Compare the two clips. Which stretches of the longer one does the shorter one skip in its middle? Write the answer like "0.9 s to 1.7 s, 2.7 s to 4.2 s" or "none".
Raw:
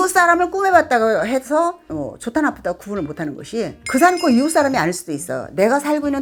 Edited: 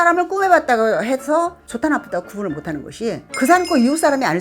1.8 s to 2.1 s